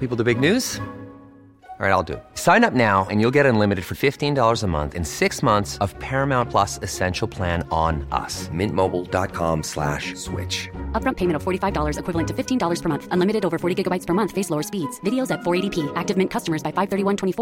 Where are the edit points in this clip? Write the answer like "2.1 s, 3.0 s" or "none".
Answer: none

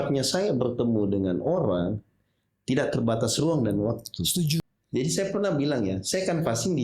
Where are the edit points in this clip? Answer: 4.7 s

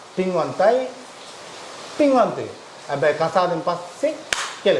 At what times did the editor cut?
none

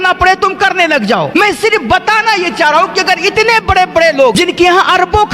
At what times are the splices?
1.4 s, 4.4 s

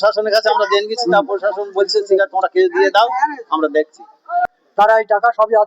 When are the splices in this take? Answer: 4.6 s

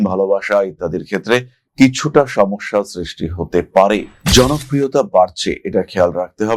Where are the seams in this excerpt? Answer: 4.2 s

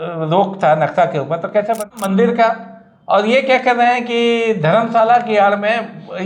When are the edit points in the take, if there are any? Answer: 1.9 s

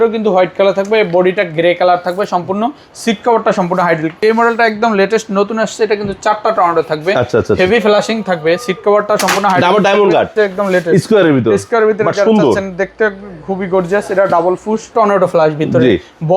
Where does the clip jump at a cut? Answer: 4.1 s, 10.3 s, 14.9 s

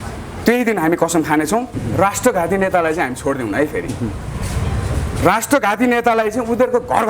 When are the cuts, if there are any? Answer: 1.8 s

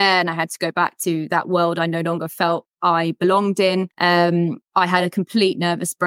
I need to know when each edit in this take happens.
2.7 s, 3.9 s

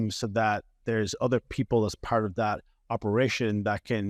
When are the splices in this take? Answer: none

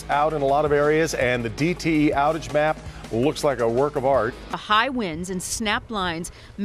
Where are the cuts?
4.6 s

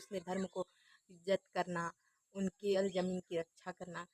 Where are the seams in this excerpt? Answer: 2.7 s

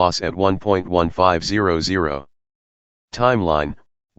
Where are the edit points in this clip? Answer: 1.0 s

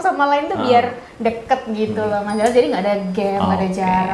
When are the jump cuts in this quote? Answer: none

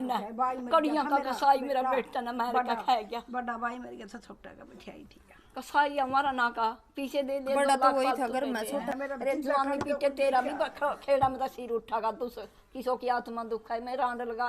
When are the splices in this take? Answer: 8.9 s

